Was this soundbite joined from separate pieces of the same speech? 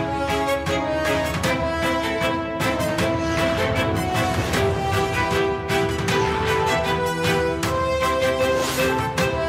no; 0 cuts

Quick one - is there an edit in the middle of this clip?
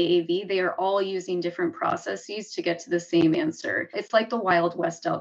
yes; 1 cut; at 4.0 s

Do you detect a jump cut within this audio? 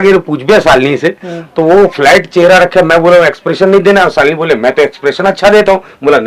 no; 0 cuts

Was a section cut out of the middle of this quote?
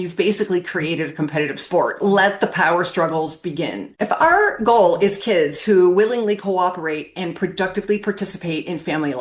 yes; 2 cuts; at 2.0 s, 3.8 s

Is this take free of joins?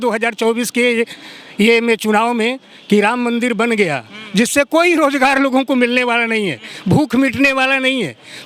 yes; 0 cuts

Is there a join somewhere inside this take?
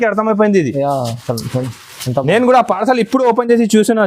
no; 0 cuts

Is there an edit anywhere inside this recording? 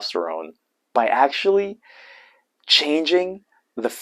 no; 0 cuts

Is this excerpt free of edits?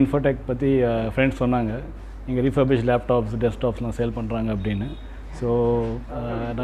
yes; 0 cuts

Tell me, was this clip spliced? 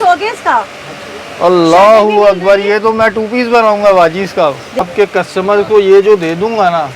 yes; 1 cut; at 4.9 s

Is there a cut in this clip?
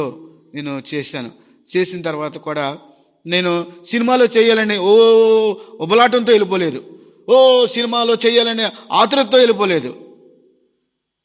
no; 0 cuts

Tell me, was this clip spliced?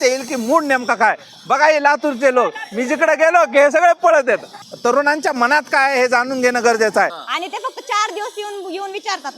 yes; 2 cuts; at 4.5 s, 7.2 s

